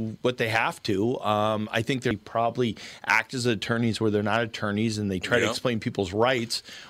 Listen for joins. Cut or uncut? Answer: cut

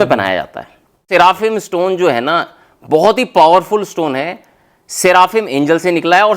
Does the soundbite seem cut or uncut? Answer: cut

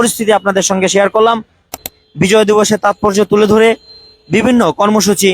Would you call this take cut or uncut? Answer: cut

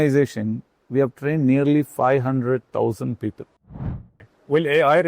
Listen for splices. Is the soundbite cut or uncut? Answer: cut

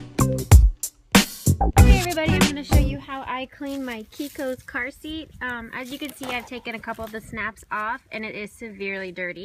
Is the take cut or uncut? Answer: cut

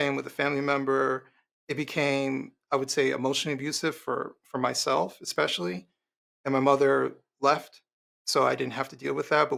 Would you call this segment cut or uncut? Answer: uncut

